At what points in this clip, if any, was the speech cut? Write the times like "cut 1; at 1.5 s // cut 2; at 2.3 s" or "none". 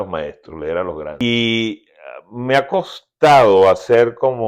cut 1; at 1.2 s